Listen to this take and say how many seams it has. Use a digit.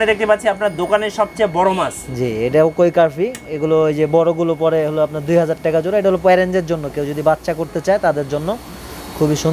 0